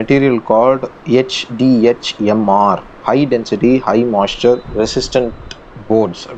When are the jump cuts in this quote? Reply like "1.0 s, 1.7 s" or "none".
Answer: none